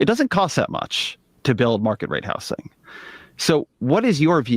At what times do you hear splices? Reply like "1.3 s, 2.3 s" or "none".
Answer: 2.2 s